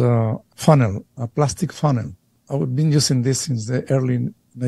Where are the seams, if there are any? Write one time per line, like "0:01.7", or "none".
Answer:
none